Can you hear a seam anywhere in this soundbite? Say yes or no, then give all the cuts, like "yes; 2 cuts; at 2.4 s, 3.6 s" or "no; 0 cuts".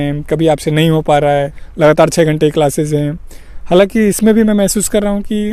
yes; 1 cut; at 1.6 s